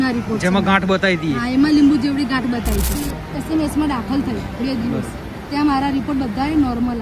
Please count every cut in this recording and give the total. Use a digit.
1